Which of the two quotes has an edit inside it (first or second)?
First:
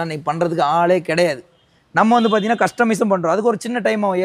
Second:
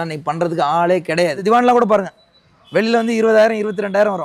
second